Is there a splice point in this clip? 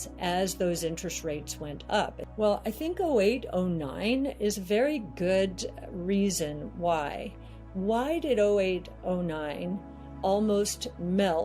yes; 1 cut; at 2.2 s

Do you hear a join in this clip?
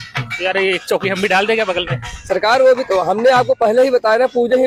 no; 0 cuts

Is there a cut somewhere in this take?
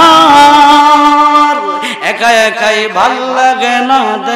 no; 0 cuts

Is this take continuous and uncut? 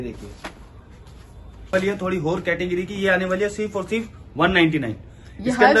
no; 1 cut; at 1.7 s

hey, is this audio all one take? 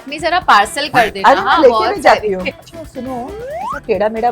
no; 1 cut; at 2.5 s

